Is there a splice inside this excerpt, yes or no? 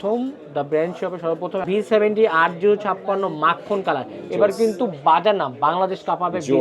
yes